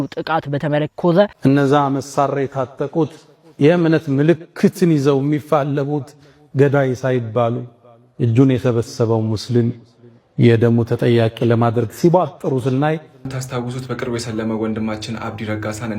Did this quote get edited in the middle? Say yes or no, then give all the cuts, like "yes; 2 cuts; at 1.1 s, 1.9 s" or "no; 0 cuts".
yes; 2 cuts; at 1.3 s, 13.4 s